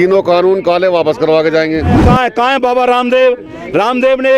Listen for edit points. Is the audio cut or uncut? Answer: cut